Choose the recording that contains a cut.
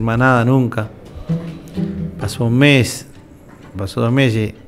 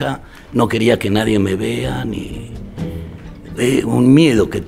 first; 1 cut; at 3.8 s

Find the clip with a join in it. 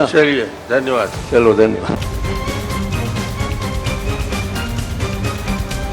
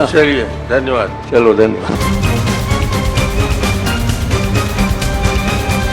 second; 1 cut; at 2.0 s

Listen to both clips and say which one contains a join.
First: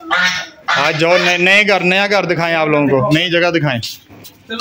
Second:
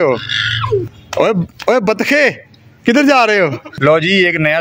second; 2 cuts; at 1.0 s, 3.7 s

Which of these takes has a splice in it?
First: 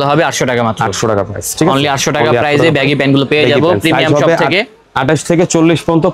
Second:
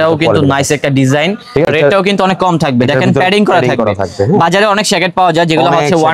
second; 1 cut; at 1.7 s

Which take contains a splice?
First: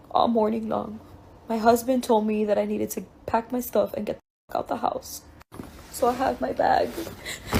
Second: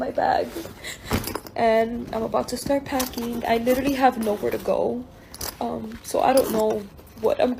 first; 1 cut; at 5.5 s

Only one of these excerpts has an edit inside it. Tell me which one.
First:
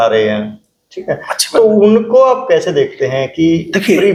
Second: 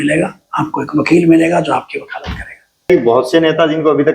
second; 1 cut; at 2.9 s

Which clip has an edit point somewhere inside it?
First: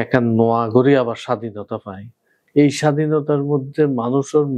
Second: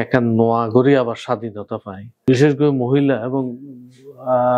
second; 1 cut; at 2.3 s

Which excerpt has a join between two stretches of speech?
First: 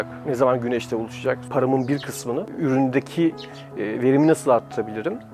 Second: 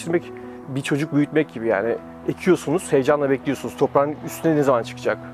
first; 2 cuts; at 1.5 s, 2.5 s

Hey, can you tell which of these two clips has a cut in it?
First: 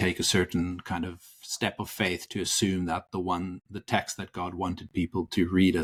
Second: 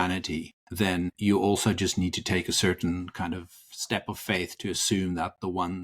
second; 1 cut; at 1.1 s

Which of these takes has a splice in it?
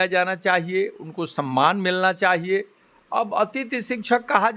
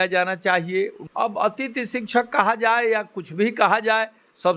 second; 1 cut; at 1.0 s

